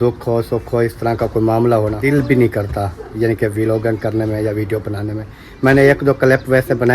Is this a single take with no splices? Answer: no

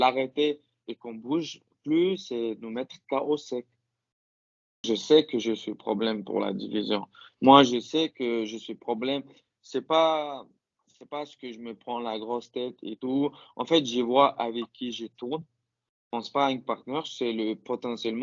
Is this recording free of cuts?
no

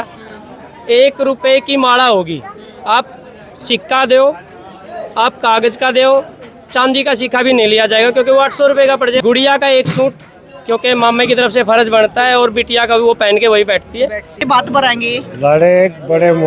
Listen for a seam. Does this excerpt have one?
yes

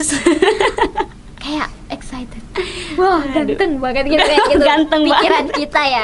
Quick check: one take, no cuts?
yes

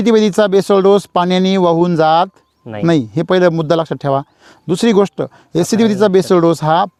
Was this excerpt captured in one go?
yes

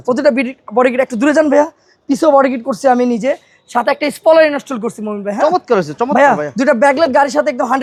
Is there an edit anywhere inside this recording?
no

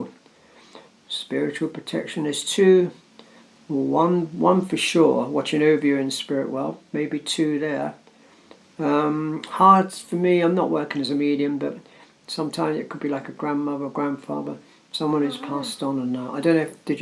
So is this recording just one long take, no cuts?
yes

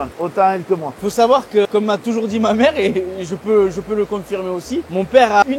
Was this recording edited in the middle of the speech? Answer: no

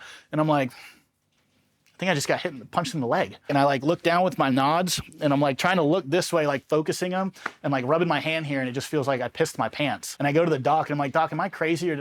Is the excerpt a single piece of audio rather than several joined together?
no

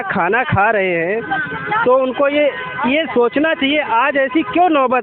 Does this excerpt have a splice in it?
no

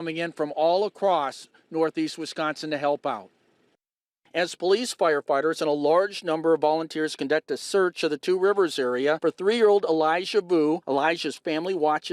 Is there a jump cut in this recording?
no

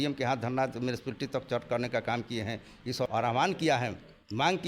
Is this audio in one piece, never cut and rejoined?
no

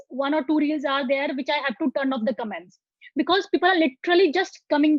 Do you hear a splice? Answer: no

